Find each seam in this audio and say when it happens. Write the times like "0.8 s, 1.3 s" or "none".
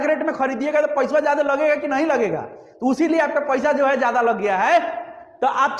none